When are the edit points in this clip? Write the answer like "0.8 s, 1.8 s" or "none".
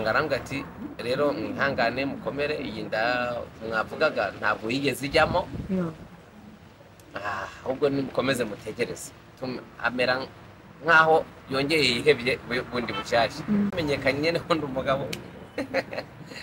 13.7 s